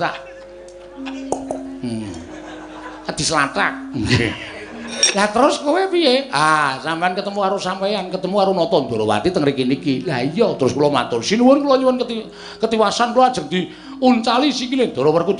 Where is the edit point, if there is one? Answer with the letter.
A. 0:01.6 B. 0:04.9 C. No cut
B